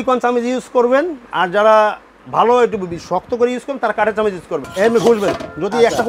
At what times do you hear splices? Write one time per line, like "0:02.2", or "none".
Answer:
0:04.6